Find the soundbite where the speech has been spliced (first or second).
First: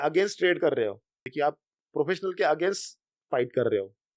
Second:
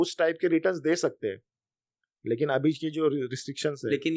first